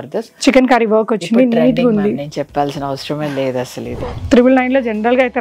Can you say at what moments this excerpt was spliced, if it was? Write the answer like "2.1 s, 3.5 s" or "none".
3.9 s